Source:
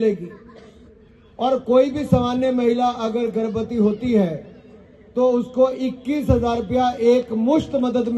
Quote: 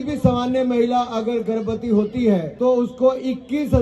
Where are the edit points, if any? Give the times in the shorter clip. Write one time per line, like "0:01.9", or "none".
0:02.5